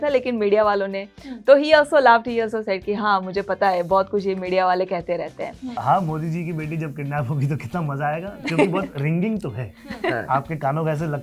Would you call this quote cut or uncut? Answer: cut